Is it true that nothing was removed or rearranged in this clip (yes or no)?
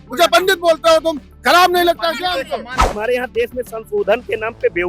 no